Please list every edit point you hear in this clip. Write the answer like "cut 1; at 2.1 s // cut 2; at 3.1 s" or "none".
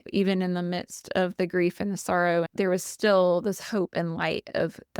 cut 1; at 2.5 s